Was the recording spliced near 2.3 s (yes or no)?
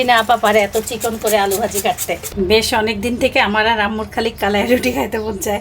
yes